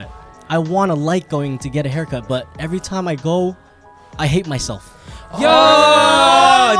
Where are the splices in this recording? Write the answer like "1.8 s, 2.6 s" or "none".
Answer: none